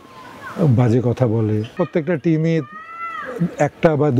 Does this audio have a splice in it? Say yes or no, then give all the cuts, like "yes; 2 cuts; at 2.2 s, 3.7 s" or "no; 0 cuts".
yes; 1 cut; at 1.7 s